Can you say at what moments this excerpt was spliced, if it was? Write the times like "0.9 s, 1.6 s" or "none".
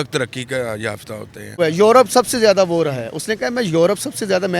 1.6 s